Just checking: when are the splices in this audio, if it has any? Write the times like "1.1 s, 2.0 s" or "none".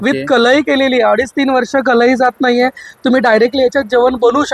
none